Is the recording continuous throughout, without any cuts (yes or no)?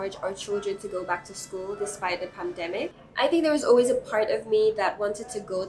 no